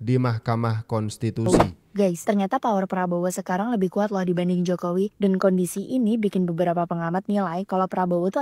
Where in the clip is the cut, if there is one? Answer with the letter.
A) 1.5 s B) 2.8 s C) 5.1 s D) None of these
A